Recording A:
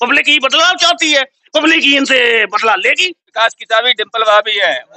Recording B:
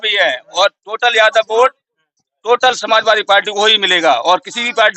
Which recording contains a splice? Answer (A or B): A